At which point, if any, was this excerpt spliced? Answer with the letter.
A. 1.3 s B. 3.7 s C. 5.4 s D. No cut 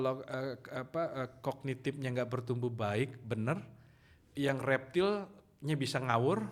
D